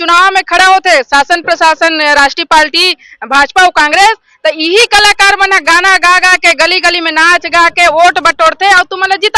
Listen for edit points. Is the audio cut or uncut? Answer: uncut